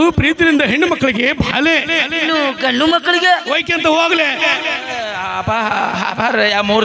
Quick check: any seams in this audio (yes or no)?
yes